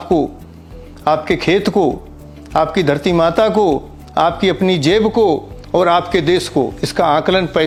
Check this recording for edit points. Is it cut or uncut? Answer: uncut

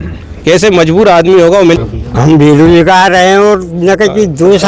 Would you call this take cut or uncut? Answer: cut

